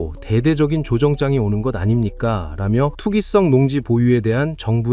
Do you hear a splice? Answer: yes; 1 cut; at 3.0 s

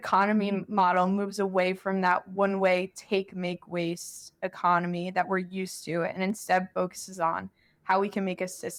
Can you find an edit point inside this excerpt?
no; 0 cuts

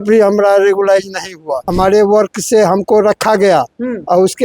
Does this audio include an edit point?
yes; 1 cut; at 1.6 s

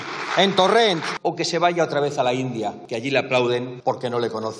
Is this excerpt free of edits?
no; 3 cuts; at 1.1 s, 2.8 s, 3.7 s

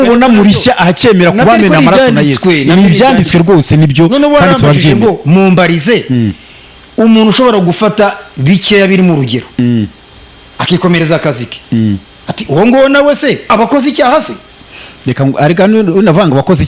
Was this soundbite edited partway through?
yes; 1 cut; at 13.5 s

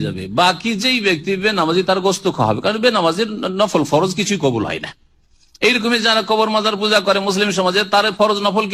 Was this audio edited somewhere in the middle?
no; 0 cuts

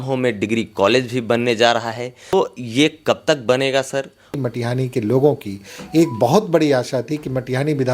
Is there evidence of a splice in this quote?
yes; 2 cuts; at 2.3 s, 4.3 s

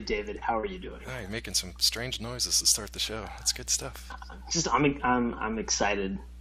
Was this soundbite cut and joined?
no; 0 cuts

